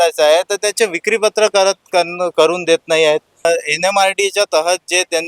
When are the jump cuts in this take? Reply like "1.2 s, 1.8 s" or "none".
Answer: 3.4 s